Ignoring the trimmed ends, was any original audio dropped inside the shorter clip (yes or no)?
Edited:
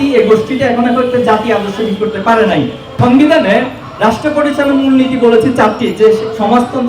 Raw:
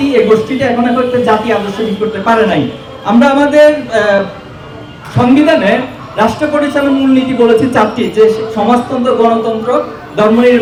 yes